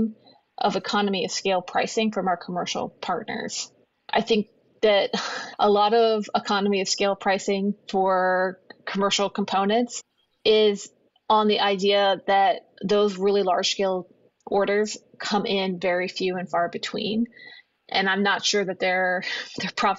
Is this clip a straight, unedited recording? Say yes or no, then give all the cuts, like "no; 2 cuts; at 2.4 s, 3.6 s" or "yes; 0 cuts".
yes; 0 cuts